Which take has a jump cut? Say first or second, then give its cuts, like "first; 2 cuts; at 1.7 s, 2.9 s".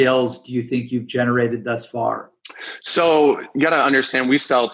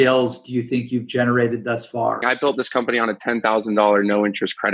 second; 1 cut; at 2.2 s